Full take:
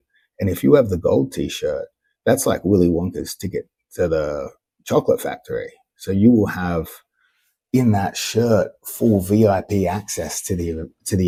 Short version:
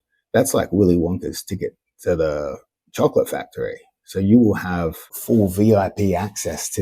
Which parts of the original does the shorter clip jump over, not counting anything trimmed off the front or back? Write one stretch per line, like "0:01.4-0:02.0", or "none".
0:07.0-0:08.8